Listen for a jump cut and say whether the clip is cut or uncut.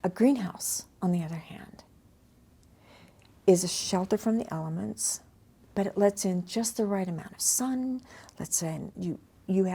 uncut